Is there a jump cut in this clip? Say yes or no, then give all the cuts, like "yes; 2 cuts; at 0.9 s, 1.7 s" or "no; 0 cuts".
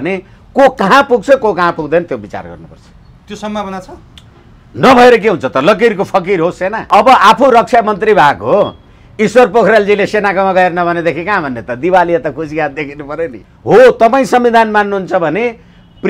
yes; 2 cuts; at 6.9 s, 13.5 s